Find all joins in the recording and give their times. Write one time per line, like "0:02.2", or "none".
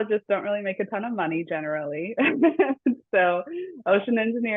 none